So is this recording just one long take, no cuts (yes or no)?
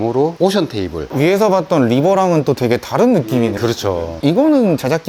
yes